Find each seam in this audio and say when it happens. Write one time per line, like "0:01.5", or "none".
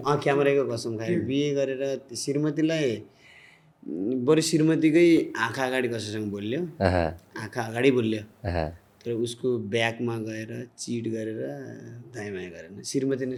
none